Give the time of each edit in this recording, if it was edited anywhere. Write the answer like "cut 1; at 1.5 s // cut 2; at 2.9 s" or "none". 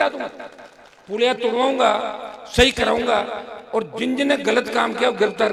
none

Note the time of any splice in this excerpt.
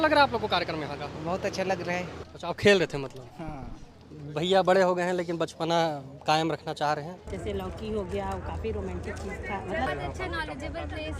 cut 1; at 2.1 s // cut 2; at 7.2 s // cut 3; at 9.9 s

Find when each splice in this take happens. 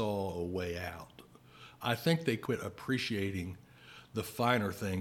cut 1; at 2.4 s

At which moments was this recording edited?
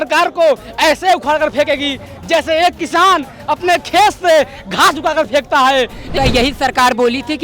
cut 1; at 6.1 s

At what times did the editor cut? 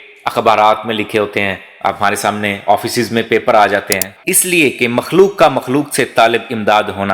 cut 1; at 4.1 s

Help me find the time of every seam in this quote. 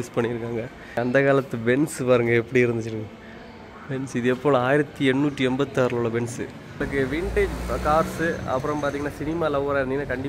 cut 1; at 1.0 s // cut 2; at 6.8 s

